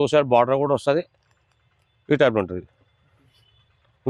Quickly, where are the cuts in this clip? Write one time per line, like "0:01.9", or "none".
none

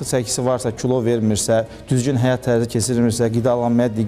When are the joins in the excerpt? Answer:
none

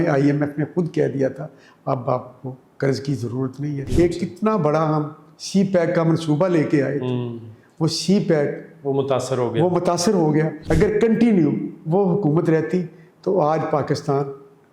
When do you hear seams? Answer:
0:03.8
0:10.6

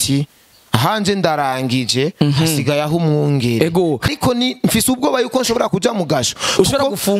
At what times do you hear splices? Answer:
0:04.1

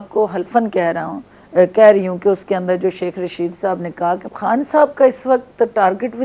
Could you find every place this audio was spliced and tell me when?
0:04.3

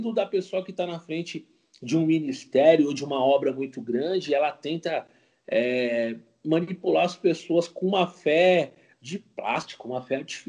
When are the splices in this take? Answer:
none

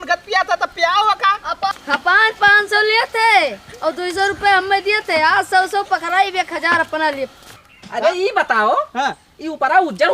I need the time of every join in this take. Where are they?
0:01.7
0:07.4

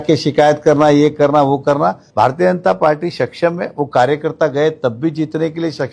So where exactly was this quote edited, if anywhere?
0:02.0

